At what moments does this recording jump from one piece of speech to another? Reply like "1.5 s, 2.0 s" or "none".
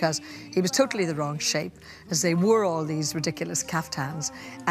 2.9 s

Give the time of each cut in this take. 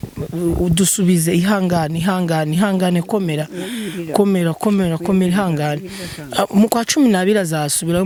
none

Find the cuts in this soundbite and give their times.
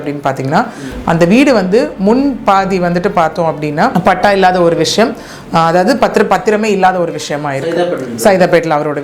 3.9 s

